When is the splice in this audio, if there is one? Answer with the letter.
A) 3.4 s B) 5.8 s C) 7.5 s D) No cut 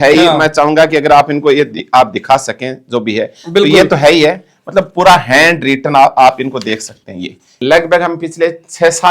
C